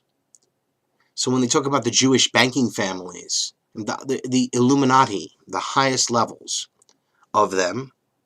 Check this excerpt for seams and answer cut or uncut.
uncut